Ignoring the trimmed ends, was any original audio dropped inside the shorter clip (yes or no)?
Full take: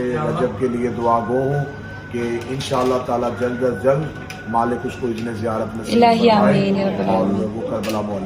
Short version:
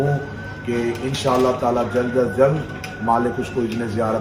no